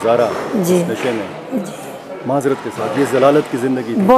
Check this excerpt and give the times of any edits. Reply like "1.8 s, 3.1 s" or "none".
none